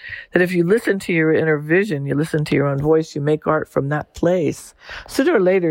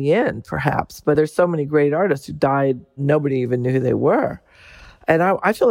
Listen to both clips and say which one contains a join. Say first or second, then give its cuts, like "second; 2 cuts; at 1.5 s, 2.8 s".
second; 2 cuts; at 1.2 s, 3.0 s